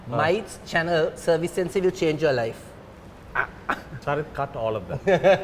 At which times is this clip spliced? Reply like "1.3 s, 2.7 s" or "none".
3.9 s